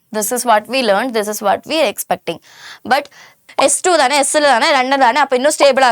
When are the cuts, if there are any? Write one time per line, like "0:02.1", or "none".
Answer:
0:03.4